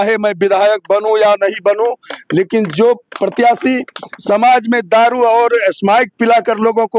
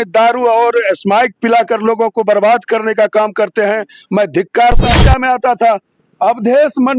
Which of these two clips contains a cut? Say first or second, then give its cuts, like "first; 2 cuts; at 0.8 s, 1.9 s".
second; 1 cut; at 4.9 s